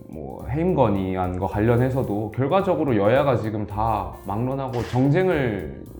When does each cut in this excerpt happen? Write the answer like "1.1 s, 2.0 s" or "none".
none